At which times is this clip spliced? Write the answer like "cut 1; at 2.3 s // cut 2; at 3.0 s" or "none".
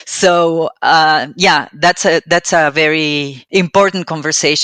cut 1; at 3.3 s